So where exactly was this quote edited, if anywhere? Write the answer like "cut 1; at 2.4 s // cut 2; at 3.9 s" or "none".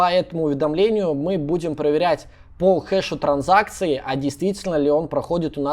none